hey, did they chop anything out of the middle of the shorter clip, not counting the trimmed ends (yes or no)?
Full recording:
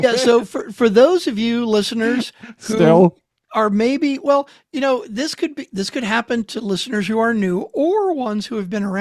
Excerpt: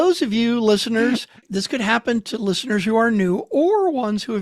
yes